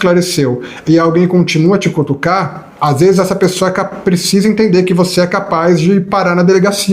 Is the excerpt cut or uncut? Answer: cut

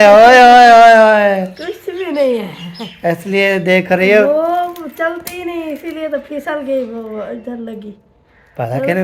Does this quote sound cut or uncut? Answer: uncut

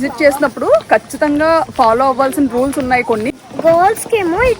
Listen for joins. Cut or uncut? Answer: cut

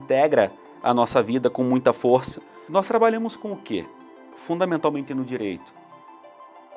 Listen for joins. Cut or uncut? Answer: cut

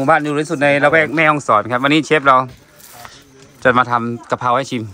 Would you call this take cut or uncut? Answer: uncut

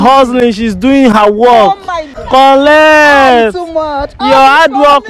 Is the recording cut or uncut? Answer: cut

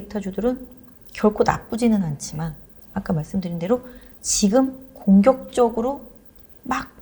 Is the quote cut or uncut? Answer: uncut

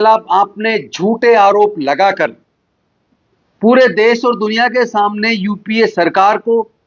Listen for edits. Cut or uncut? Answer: uncut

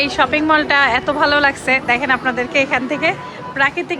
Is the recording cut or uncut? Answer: uncut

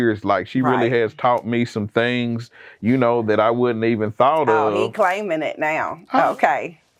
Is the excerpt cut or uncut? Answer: uncut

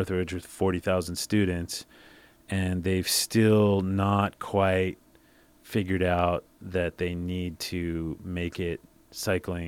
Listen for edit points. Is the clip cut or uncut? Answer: uncut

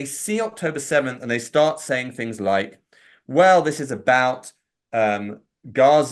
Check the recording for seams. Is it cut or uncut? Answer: cut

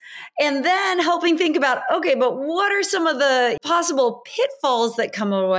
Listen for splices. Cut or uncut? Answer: cut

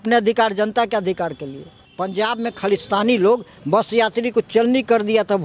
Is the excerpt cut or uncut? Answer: cut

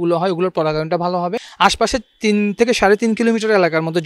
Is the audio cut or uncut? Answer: cut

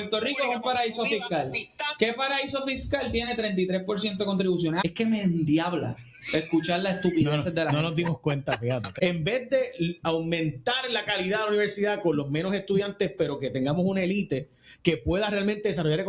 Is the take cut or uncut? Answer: cut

